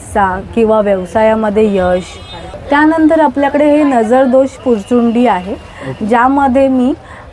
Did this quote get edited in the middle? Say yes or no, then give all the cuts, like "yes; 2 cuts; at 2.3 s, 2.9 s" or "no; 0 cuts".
yes; 1 cut; at 2.5 s